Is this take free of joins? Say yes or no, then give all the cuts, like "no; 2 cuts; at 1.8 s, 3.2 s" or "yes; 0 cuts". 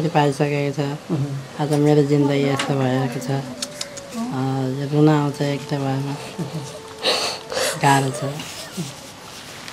yes; 0 cuts